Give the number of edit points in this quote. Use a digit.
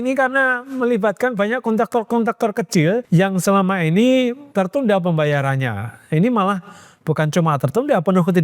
2